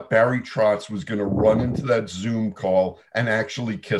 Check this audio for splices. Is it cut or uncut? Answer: uncut